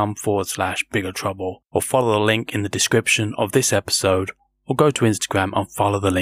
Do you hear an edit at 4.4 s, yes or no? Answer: no